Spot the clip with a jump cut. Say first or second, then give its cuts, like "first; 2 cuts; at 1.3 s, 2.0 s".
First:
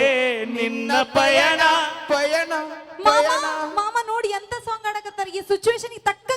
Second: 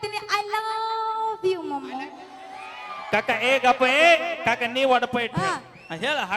second; 1 cut; at 5.4 s